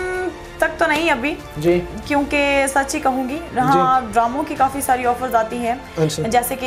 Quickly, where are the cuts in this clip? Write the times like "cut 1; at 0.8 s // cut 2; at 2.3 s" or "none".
none